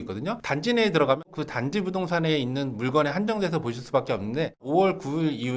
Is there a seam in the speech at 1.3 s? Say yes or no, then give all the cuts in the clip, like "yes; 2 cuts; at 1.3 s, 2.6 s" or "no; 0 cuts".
yes; 2 cuts; at 1.3 s, 4.6 s